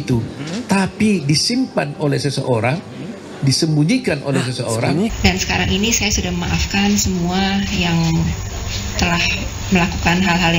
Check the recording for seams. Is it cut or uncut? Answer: cut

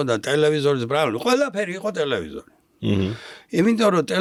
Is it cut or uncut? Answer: uncut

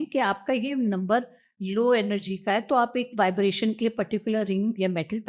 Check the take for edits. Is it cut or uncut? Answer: cut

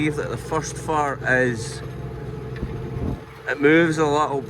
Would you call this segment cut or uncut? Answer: uncut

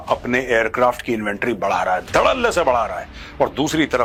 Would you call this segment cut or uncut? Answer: uncut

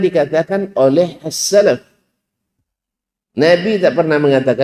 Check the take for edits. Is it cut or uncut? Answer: uncut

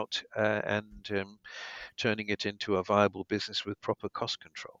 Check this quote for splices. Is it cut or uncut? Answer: uncut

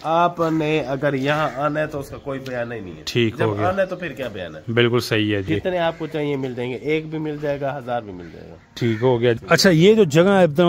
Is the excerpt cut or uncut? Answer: cut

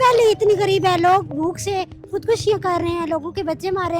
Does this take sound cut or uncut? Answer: uncut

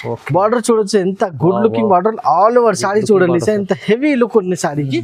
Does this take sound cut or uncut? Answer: uncut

